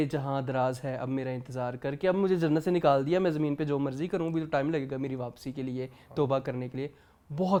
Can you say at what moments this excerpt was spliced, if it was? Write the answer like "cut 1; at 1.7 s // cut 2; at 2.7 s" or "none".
none